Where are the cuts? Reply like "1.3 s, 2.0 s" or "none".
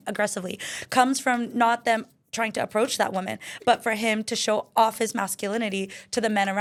none